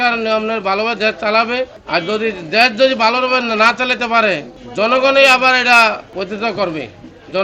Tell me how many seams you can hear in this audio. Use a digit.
3